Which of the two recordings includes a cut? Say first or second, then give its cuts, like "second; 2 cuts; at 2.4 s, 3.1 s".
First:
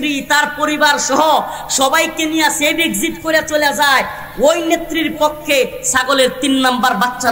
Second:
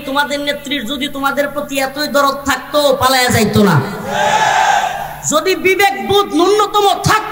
second; 1 cut; at 5.1 s